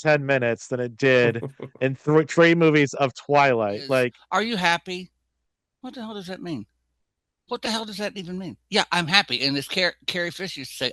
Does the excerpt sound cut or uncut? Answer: cut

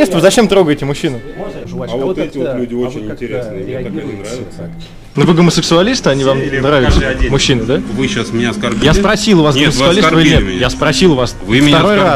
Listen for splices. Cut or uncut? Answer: cut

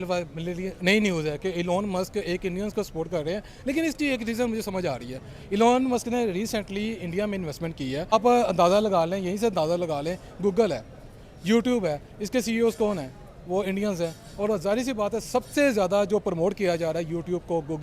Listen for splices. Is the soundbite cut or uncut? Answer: cut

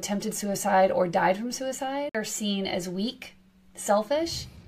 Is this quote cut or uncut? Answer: cut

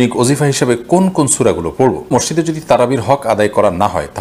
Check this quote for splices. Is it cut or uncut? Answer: cut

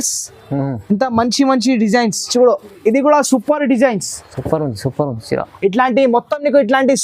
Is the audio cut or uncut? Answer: cut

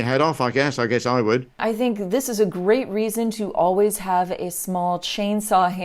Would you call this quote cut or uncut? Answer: cut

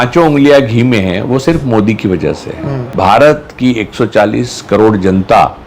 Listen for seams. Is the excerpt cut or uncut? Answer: cut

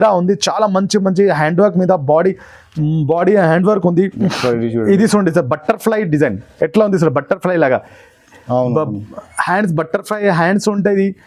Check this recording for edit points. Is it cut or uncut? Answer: cut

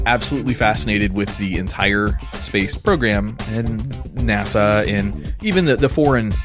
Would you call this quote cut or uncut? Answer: cut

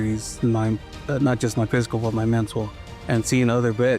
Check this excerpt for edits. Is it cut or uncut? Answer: uncut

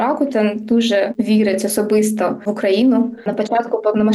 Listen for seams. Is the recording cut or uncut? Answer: cut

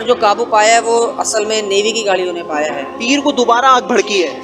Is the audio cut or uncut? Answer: cut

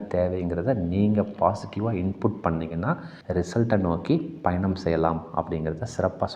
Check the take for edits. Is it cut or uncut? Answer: cut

